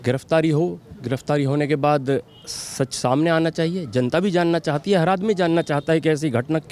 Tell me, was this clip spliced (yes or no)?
no